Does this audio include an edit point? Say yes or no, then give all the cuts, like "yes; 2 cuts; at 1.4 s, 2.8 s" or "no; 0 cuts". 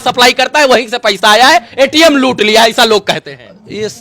no; 0 cuts